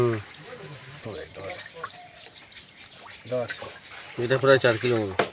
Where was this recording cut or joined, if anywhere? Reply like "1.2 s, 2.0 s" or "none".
1.0 s